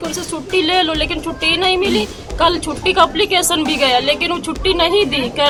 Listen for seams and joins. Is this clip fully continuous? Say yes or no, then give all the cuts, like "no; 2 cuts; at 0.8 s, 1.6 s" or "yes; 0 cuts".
yes; 0 cuts